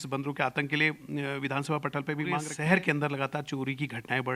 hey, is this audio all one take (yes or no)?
no